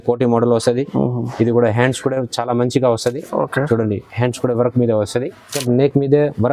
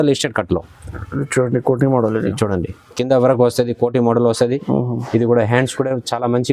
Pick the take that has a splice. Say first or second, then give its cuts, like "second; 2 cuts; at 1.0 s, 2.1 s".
first; 1 cut; at 5.6 s